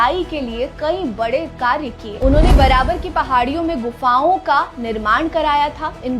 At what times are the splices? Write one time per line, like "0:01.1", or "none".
0:02.1